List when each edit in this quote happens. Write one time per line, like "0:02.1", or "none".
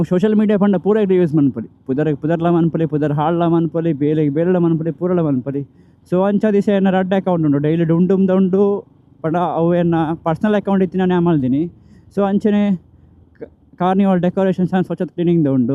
none